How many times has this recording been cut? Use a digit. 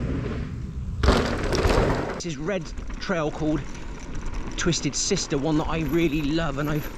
1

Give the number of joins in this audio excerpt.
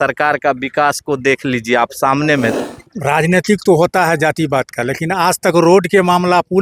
1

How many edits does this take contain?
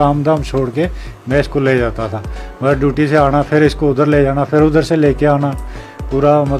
0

